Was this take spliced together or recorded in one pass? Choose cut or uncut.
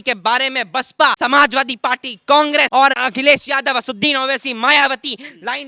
cut